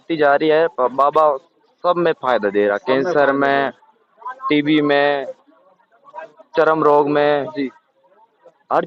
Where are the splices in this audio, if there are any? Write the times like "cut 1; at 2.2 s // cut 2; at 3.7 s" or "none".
none